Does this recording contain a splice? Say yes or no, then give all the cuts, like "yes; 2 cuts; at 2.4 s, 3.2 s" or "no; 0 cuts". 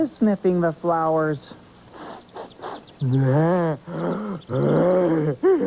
yes; 1 cut; at 1.0 s